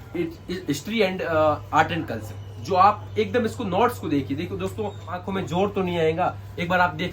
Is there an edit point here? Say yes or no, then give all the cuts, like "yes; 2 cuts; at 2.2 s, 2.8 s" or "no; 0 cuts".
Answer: yes; 1 cut; at 5.2 s